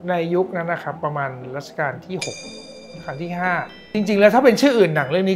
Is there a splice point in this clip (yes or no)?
yes